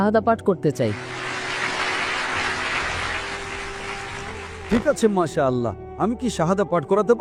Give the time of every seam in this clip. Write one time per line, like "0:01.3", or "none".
none